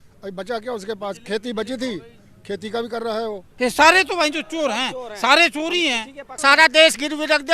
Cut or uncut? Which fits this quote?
cut